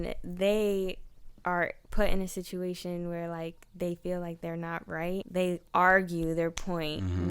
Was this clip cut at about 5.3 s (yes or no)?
yes